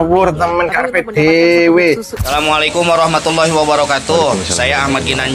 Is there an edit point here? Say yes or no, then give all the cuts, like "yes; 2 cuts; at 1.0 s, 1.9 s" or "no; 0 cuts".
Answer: yes; 1 cut; at 2.1 s